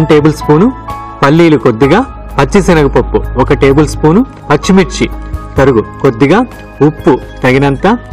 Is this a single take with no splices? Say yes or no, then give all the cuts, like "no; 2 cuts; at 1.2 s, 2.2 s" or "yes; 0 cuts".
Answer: yes; 0 cuts